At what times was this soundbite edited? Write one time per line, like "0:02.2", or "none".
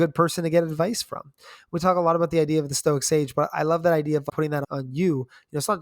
0:04.4